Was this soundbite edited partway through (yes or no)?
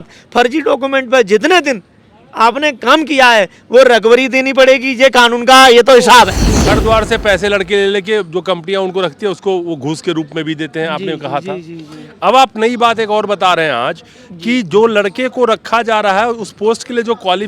yes